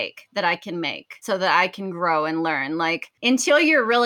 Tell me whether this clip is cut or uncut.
cut